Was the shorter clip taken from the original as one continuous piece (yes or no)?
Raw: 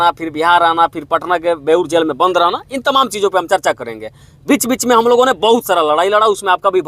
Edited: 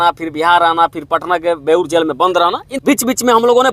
no